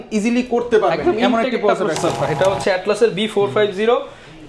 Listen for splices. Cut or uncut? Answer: cut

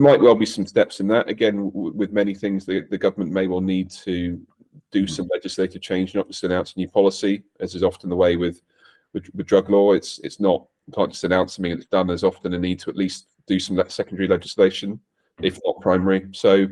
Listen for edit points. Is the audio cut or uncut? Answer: uncut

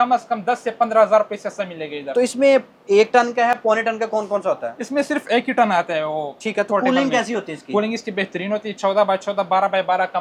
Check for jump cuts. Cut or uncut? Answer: uncut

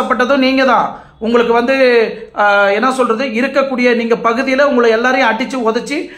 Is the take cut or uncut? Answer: uncut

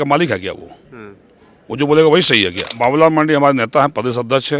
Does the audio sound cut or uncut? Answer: cut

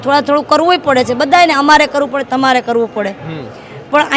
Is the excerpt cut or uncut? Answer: uncut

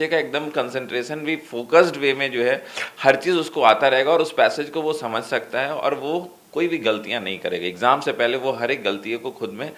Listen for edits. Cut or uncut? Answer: uncut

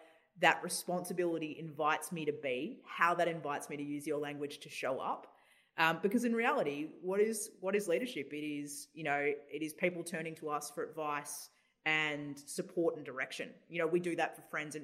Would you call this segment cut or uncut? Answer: uncut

